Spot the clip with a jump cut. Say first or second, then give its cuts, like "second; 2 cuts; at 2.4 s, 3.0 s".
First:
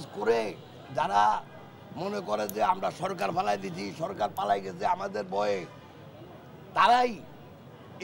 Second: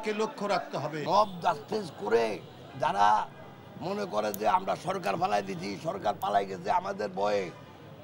second; 1 cut; at 0.9 s